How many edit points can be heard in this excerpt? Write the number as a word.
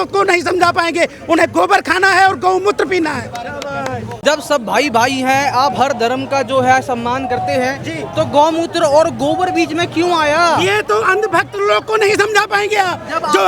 one